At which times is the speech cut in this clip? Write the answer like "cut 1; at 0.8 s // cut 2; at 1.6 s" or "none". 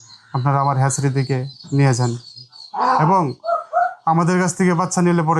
none